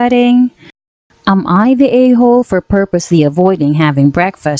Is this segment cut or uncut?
cut